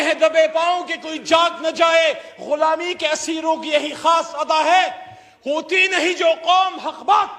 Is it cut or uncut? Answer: uncut